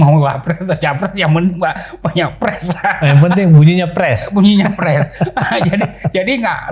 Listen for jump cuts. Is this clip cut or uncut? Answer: uncut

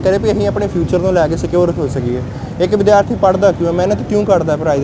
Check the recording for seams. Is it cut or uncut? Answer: uncut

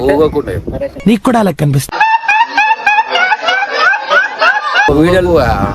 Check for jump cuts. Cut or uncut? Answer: cut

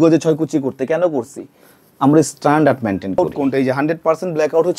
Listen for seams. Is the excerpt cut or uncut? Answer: cut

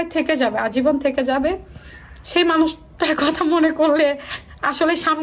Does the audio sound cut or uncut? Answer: uncut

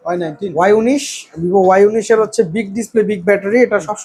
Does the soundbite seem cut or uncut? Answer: uncut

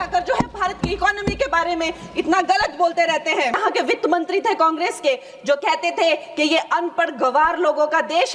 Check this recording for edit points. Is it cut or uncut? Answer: cut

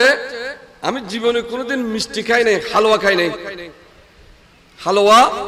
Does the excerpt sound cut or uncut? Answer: uncut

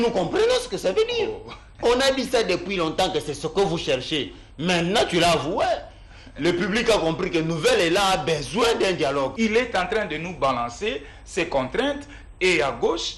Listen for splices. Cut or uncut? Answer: cut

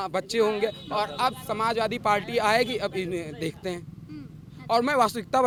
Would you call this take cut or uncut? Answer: uncut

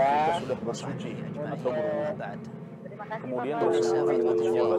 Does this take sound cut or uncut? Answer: cut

